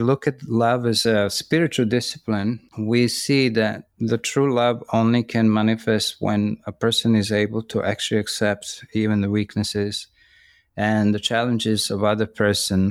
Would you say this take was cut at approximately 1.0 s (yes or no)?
yes